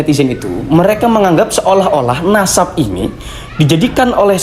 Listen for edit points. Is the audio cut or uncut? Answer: uncut